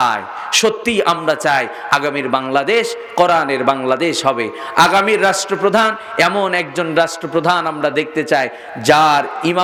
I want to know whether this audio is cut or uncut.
uncut